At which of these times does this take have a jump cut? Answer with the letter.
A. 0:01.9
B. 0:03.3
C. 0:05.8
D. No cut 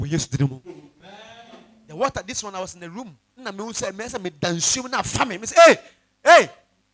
D